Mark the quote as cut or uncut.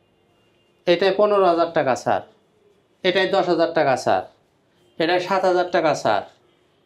uncut